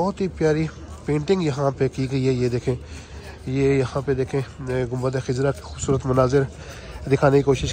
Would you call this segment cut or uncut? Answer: uncut